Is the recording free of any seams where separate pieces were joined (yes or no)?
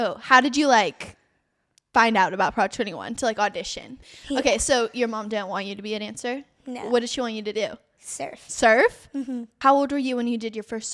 no